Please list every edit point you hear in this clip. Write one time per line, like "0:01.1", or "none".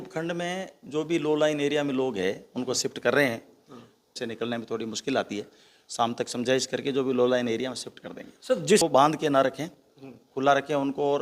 0:04.2
0:08.8